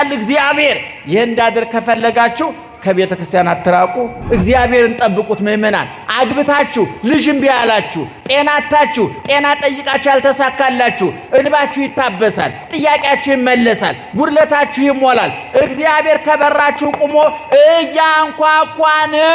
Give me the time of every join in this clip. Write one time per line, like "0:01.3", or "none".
0:04.2